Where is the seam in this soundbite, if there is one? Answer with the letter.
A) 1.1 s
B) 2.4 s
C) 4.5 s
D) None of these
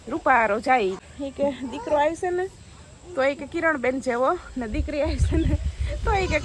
A